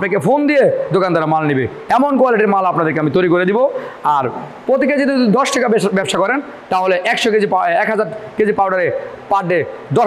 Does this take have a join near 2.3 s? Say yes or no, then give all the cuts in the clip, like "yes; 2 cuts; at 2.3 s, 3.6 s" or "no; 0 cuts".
no; 0 cuts